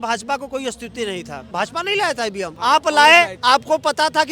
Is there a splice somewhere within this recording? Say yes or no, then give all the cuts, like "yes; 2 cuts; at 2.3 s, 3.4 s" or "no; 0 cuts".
yes; 3 cuts; at 1.4 s, 2.5 s, 3.4 s